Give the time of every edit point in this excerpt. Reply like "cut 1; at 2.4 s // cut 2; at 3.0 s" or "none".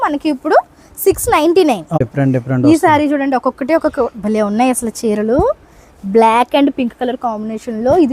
none